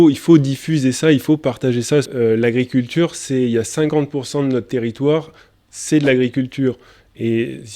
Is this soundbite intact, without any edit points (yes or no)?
no